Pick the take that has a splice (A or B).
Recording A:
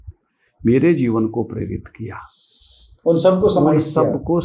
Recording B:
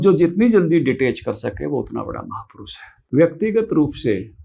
B